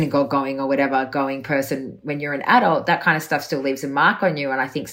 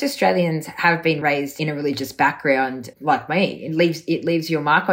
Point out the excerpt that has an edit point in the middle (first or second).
second